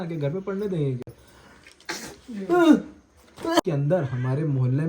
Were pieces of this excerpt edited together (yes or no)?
yes